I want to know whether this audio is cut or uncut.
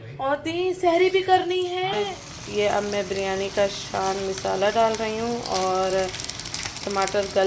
cut